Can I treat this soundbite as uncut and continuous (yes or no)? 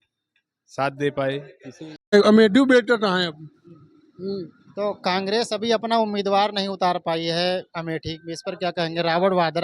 no